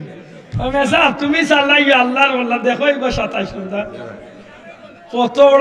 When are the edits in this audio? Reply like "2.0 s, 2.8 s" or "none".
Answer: none